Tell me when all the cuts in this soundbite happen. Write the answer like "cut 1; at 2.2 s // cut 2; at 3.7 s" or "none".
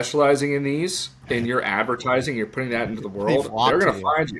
none